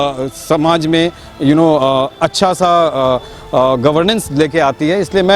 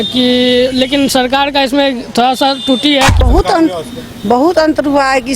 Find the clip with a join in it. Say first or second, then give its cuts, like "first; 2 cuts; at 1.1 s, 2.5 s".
second; 1 cut; at 3.2 s